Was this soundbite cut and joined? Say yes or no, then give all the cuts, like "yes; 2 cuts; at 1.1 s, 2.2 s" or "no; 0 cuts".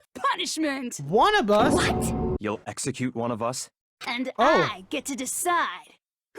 yes; 1 cut; at 2.4 s